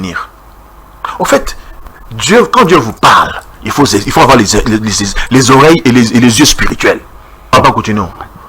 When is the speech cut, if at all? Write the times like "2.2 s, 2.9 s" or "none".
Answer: 7.5 s

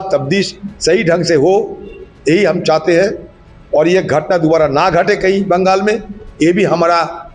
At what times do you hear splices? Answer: none

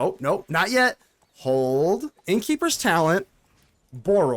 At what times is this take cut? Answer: 2.2 s

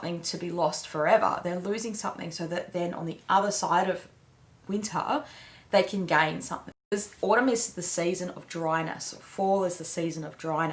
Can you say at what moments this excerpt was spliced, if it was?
6.9 s

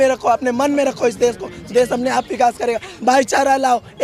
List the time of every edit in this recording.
none

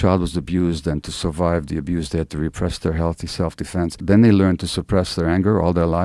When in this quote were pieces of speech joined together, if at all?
4.0 s

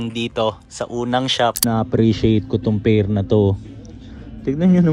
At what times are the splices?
1.6 s

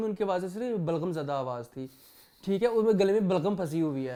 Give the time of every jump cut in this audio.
none

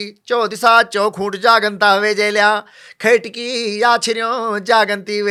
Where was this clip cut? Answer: none

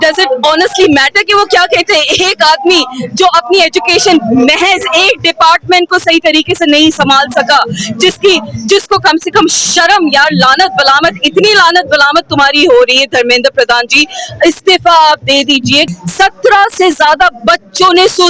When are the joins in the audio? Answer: 15.9 s

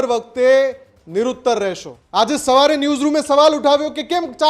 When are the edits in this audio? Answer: 1.9 s

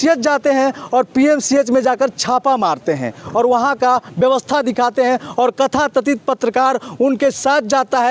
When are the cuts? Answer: none

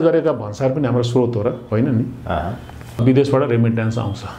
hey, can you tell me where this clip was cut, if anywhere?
3.0 s

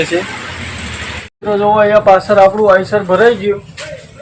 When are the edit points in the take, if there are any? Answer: none

